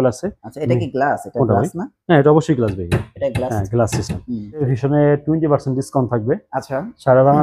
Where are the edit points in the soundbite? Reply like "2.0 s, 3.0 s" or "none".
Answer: 4.6 s